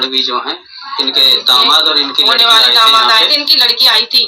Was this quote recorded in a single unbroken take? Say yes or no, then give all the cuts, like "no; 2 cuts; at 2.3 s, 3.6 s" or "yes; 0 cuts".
yes; 0 cuts